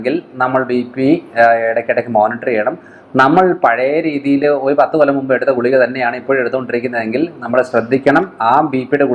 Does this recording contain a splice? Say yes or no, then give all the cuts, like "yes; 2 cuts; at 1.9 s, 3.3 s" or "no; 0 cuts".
no; 0 cuts